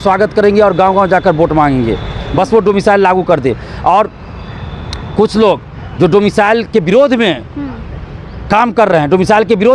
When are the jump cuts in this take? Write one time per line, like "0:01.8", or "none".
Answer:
none